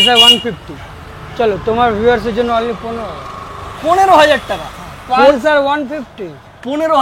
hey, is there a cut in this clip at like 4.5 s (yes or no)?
no